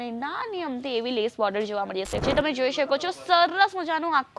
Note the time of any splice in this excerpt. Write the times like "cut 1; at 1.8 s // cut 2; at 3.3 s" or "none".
cut 1; at 2.2 s